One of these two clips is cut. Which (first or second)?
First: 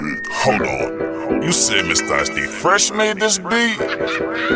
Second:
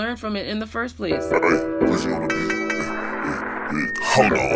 second